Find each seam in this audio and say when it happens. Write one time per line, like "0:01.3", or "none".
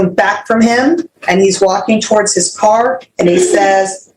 0:01.1